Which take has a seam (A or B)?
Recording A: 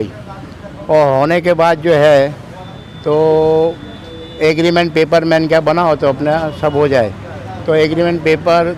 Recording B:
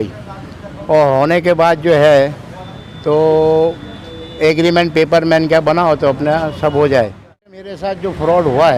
B